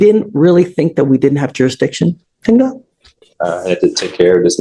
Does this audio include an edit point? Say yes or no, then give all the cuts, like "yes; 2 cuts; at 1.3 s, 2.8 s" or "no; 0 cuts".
no; 0 cuts